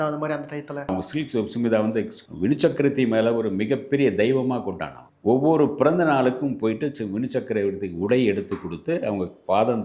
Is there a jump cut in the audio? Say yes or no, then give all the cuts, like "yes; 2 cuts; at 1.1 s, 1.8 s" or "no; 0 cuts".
yes; 1 cut; at 0.9 s